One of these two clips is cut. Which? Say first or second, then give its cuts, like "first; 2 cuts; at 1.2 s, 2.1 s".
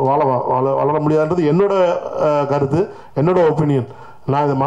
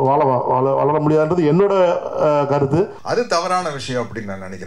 second; 1 cut; at 3.0 s